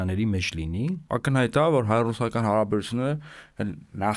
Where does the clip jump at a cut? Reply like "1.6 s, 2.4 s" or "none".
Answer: 1.0 s